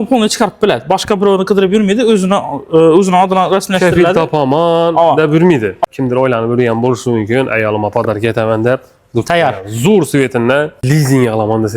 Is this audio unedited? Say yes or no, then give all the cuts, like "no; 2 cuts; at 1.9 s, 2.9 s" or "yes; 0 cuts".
no; 2 cuts; at 5.8 s, 10.8 s